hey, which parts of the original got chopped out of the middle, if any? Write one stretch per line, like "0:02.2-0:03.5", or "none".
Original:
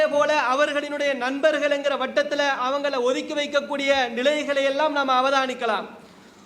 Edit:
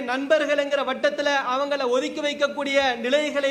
none